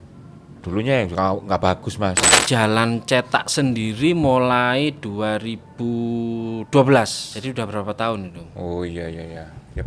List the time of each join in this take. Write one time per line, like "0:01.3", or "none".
0:02.4
0:07.2